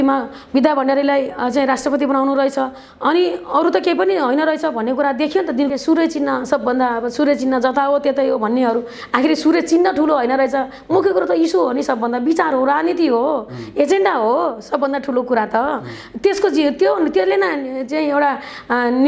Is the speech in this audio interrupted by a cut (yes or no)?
yes